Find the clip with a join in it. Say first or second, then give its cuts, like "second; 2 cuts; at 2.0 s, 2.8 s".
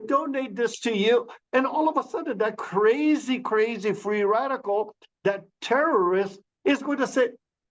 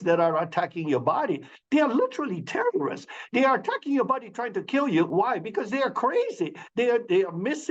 second; 1 cut; at 5.1 s